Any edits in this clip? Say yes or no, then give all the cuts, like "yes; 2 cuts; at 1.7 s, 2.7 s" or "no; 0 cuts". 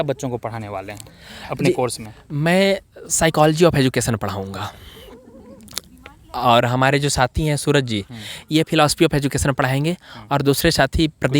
no; 0 cuts